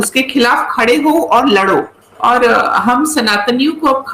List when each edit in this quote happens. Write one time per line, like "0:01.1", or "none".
0:02.0